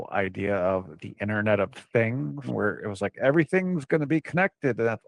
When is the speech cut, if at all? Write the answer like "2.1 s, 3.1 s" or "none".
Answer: 2.4 s